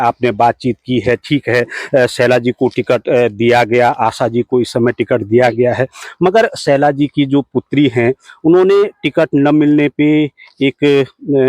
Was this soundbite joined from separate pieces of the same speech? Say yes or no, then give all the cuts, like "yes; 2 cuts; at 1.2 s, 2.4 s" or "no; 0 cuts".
no; 0 cuts